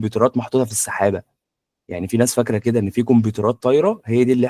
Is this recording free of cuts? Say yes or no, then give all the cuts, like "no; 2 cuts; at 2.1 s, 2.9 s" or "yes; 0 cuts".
yes; 0 cuts